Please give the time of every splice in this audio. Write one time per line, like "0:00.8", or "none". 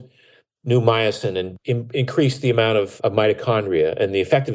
0:01.5
0:02.9